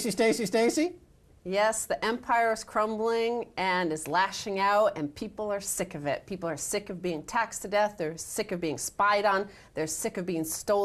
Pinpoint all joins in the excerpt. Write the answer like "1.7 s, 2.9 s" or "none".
2.4 s